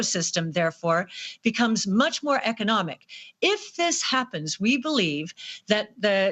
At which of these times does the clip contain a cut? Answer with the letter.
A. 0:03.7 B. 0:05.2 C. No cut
C